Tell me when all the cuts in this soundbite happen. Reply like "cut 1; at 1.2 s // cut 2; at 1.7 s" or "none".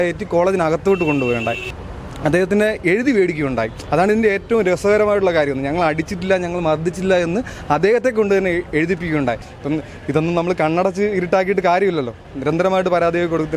cut 1; at 1.8 s // cut 2; at 9.5 s